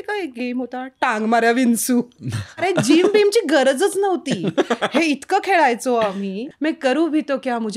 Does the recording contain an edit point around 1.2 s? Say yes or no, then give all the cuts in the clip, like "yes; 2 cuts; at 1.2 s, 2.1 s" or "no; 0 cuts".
no; 2 cuts; at 2.6 s, 6.5 s